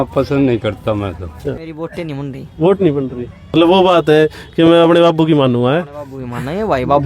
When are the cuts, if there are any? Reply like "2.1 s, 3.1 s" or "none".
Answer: 1.2 s, 3.5 s